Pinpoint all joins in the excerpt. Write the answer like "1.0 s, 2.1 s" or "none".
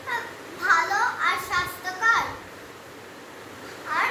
none